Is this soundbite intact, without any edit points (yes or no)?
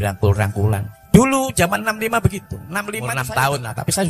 no